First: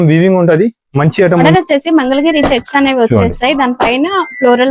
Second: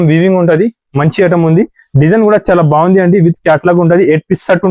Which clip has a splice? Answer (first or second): first